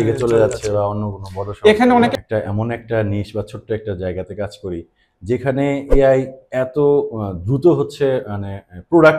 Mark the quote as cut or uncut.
cut